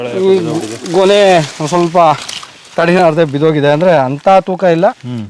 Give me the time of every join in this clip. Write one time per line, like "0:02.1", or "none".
none